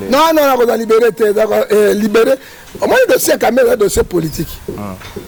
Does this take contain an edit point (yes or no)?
no